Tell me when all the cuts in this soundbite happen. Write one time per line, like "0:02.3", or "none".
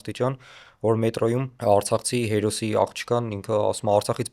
0:01.5